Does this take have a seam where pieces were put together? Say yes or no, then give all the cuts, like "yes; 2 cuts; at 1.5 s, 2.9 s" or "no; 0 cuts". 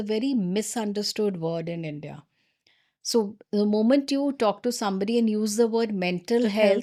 no; 0 cuts